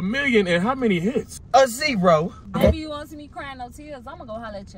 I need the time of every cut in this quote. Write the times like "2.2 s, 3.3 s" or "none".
1.3 s, 2.4 s